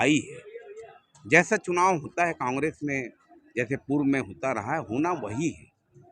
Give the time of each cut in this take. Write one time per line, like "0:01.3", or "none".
none